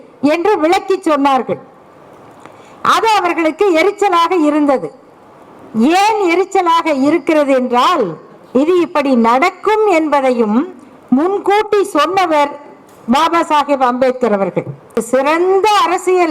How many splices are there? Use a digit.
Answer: 1